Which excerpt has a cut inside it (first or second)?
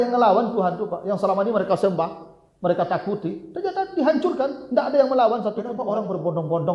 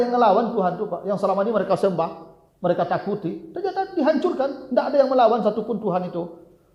first